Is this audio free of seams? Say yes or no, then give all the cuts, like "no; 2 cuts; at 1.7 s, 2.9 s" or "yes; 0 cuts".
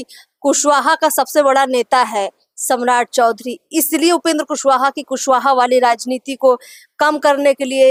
yes; 0 cuts